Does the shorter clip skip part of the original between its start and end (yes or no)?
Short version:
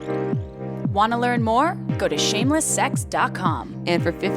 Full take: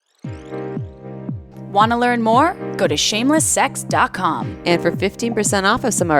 yes